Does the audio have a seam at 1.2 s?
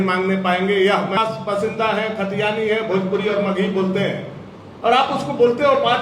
yes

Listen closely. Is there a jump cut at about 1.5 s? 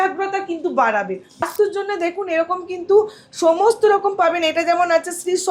yes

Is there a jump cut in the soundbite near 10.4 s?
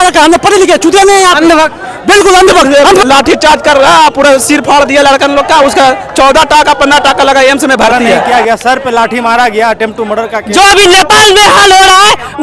yes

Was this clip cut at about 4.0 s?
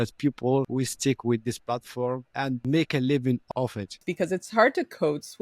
yes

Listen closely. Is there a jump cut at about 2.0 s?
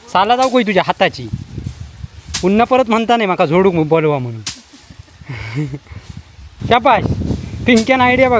no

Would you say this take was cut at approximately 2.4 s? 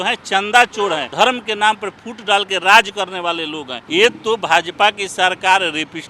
no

